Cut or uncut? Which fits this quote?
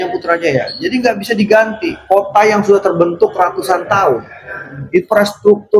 uncut